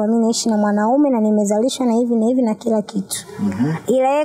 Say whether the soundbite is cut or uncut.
uncut